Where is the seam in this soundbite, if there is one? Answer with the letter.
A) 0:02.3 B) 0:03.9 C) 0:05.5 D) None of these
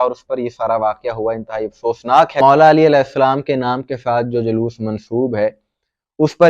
A